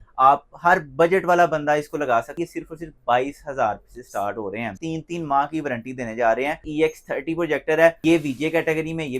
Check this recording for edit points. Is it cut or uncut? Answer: cut